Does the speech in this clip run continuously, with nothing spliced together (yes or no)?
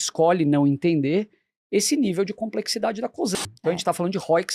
no